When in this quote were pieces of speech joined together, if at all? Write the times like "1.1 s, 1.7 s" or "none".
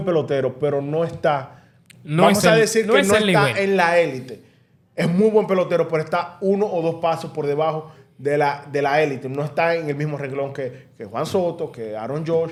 none